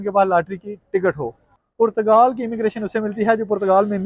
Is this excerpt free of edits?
no; 1 cut; at 1.5 s

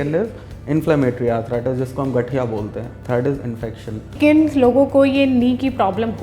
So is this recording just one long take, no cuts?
no; 2 cuts; at 2.9 s, 4.2 s

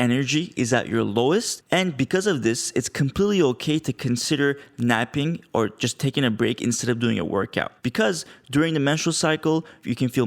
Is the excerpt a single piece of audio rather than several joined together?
no; 2 cuts; at 1.6 s, 7.7 s

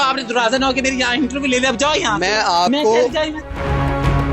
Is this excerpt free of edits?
no; 1 cut; at 3.3 s

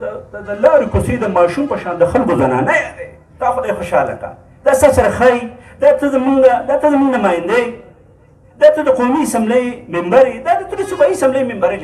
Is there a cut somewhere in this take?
no; 0 cuts

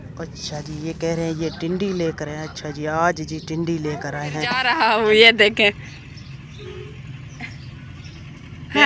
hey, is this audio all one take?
no; 1 cut; at 4.5 s

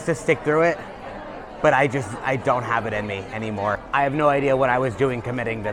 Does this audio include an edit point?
yes; 1 cut; at 3.8 s

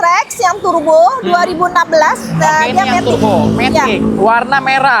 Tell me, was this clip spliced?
no; 0 cuts

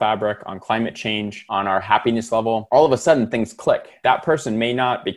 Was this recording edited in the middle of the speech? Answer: yes; 3 cuts; at 1.4 s, 2.6 s, 3.9 s

